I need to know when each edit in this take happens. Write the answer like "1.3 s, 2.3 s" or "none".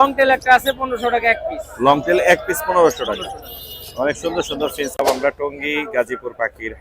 5.0 s